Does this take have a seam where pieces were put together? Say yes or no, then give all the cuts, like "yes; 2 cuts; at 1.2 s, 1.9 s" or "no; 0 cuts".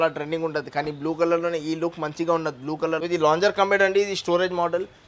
yes; 1 cut; at 3.0 s